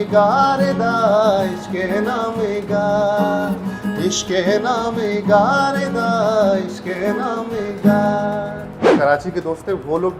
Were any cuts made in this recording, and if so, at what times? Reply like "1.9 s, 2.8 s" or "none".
8.9 s